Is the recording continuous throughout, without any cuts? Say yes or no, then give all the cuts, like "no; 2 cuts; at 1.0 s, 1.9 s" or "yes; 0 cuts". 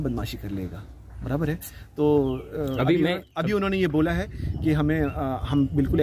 yes; 0 cuts